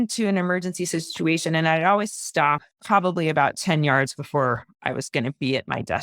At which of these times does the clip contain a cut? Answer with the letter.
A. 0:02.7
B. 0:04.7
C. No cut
A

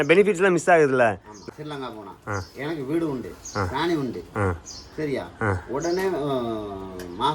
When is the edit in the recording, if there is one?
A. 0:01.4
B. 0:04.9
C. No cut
A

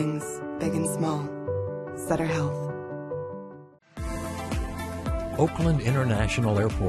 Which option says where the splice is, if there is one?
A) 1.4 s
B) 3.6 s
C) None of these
B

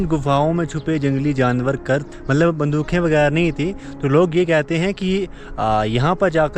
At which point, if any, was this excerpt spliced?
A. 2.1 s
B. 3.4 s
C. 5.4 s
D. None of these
A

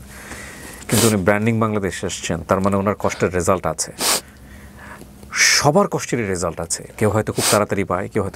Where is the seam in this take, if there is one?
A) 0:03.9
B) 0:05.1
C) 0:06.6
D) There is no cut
D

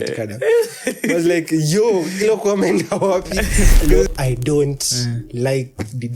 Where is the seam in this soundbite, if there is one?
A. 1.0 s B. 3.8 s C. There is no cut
B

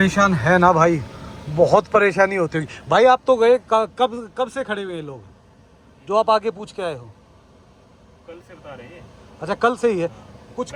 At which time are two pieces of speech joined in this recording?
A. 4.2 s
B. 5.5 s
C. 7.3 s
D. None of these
D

